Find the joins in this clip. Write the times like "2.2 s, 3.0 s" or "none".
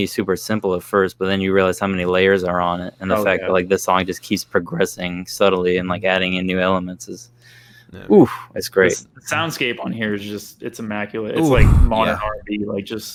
none

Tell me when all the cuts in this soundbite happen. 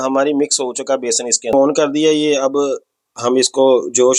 1.5 s

